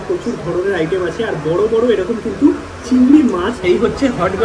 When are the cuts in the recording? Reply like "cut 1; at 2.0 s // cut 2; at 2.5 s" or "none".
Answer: cut 1; at 3.5 s